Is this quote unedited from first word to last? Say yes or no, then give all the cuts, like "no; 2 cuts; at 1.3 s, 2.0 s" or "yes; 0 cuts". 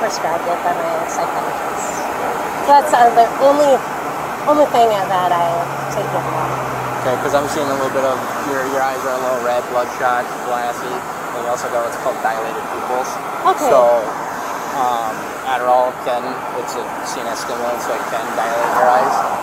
yes; 0 cuts